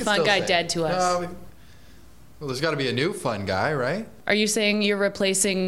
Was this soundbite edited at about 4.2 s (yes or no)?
yes